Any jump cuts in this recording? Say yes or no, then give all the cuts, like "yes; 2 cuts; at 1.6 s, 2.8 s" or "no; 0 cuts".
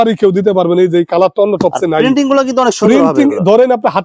no; 0 cuts